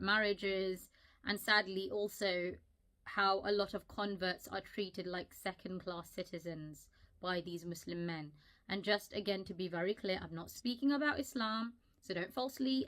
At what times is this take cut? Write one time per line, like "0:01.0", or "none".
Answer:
0:07.3